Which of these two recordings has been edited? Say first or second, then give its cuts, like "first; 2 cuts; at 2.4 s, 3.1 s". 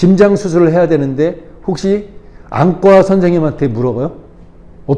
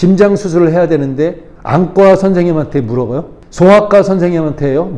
second; 2 cuts; at 1.5 s, 3.4 s